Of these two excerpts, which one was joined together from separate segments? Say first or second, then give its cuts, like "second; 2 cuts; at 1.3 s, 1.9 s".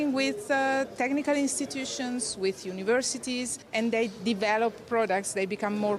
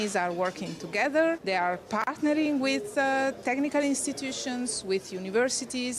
second; 1 cut; at 1.4 s